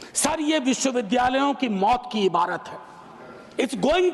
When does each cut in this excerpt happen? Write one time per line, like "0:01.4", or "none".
none